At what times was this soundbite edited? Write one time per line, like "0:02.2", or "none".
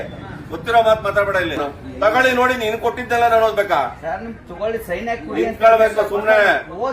0:01.6